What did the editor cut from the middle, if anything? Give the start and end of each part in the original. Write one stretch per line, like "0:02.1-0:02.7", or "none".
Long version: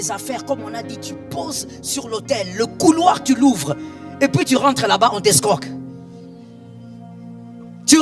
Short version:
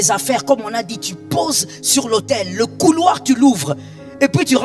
none